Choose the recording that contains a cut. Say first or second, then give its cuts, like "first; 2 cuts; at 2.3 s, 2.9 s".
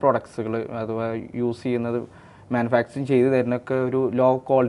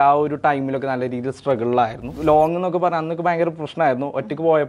second; 1 cut; at 2.1 s